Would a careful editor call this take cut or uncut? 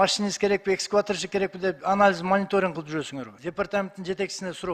cut